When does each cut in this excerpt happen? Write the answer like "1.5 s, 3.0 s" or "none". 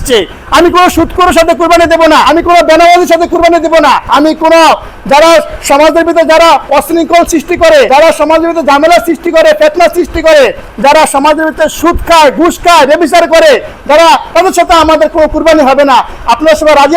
2.2 s, 4.0 s, 7.9 s